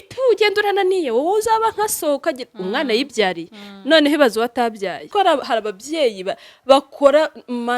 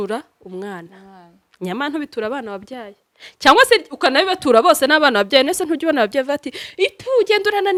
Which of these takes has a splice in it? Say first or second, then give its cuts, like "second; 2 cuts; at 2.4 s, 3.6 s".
first; 1 cut; at 5.1 s